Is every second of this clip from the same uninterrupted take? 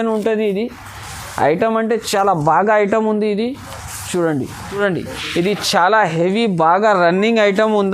no; 1 cut; at 4.7 s

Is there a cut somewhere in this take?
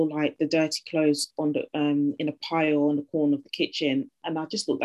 no; 0 cuts

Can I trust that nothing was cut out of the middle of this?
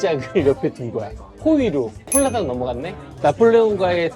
no; 1 cut; at 3.1 s

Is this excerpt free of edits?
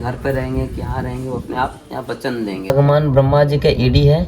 no; 1 cut; at 2.7 s

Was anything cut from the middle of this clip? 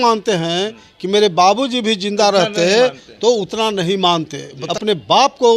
yes; 1 cut; at 4.6 s

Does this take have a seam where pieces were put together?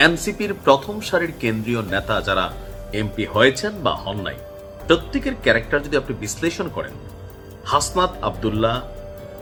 no; 0 cuts

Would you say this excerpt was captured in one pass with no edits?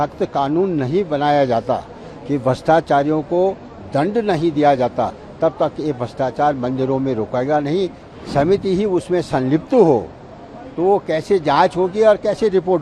no; 1 cut; at 8.0 s

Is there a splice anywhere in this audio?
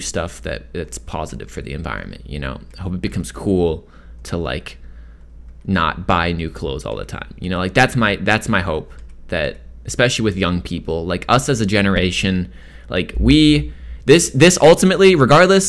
no; 0 cuts

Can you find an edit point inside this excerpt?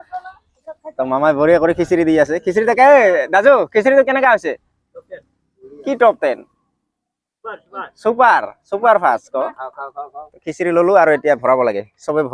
no; 0 cuts

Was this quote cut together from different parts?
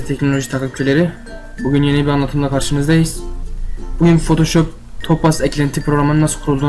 no; 0 cuts

